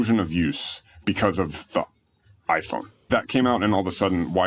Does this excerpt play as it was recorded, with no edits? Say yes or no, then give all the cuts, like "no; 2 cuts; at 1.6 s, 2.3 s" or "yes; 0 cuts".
yes; 0 cuts